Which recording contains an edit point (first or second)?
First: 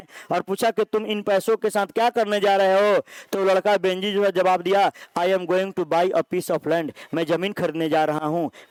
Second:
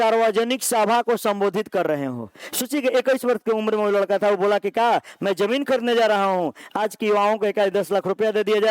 second